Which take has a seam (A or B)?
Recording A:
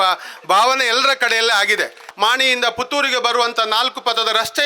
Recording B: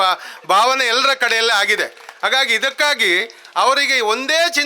A